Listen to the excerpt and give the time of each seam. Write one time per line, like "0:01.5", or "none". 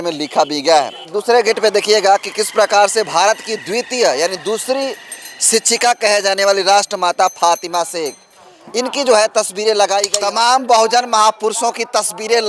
0:01.1
0:10.1